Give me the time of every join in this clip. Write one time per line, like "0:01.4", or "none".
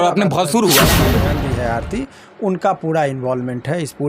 0:01.2